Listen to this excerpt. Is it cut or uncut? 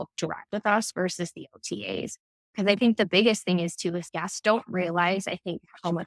cut